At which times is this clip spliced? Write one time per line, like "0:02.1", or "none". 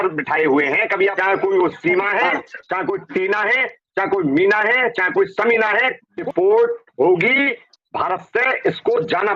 0:01.2
0:06.1

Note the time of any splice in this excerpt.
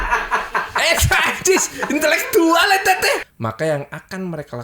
0:03.3

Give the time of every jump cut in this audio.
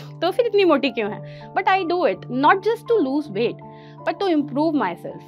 none

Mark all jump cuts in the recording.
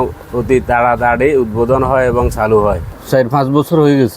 0:02.9

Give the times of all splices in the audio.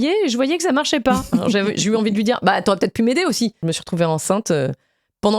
0:03.6

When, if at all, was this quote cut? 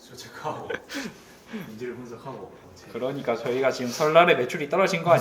0:02.7

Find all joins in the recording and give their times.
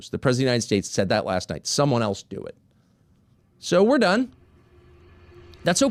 none

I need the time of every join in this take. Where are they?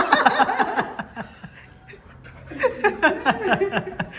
none

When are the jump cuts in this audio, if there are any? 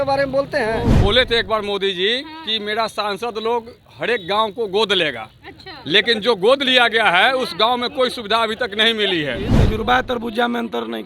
0:00.9
0:09.5

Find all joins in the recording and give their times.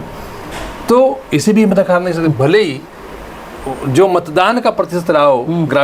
none

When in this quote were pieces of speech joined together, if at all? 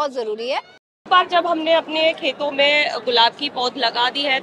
0:01.0

